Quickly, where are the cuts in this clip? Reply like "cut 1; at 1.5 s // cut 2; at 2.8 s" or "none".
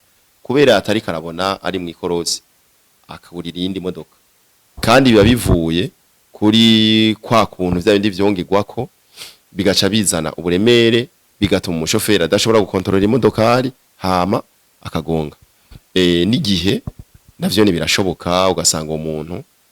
cut 1; at 4.8 s